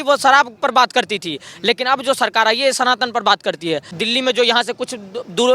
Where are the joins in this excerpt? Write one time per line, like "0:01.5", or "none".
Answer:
0:04.0